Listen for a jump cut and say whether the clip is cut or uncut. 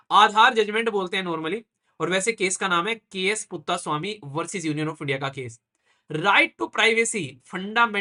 uncut